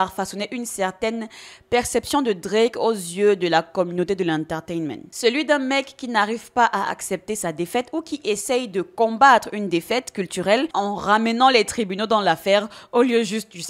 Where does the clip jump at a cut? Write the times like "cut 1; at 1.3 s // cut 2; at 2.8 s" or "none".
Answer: cut 1; at 10.7 s